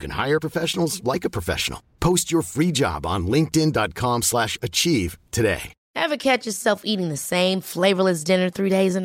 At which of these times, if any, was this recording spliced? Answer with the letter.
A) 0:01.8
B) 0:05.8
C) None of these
B